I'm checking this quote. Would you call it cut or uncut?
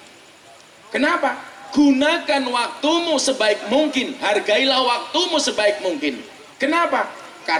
uncut